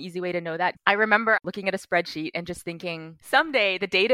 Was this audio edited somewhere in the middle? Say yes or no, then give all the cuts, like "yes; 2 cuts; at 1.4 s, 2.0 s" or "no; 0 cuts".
yes; 3 cuts; at 0.7 s, 1.4 s, 3.1 s